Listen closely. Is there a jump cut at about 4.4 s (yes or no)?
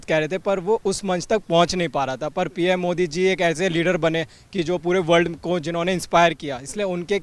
no